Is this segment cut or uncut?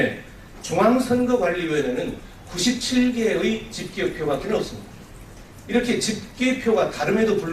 cut